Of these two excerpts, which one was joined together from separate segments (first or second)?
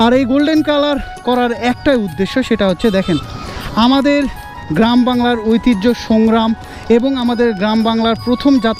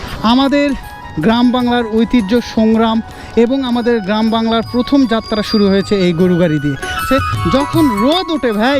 second